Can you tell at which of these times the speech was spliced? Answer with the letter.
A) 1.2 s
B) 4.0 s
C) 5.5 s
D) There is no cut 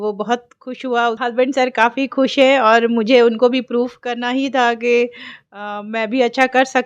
A